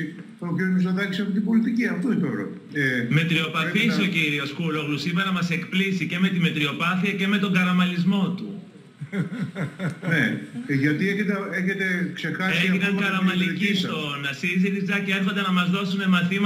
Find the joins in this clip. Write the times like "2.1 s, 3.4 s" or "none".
2.6 s